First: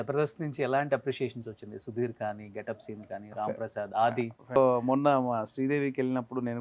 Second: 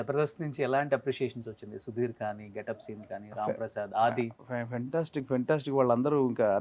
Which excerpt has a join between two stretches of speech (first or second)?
first